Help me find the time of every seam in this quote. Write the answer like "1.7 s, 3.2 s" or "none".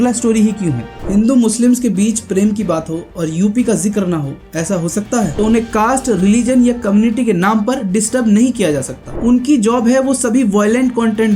1.1 s, 5.3 s, 9.0 s